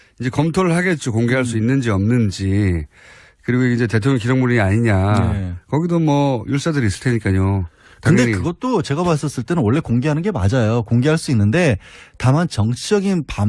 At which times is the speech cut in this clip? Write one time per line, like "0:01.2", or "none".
none